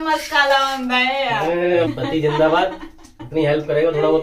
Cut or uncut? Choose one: cut